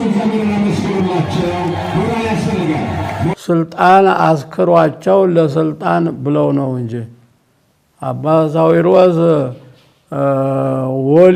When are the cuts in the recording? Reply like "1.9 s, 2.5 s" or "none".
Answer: 3.4 s